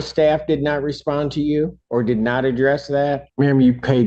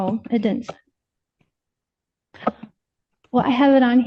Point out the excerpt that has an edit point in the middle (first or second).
first